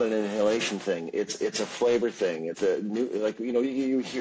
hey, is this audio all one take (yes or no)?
no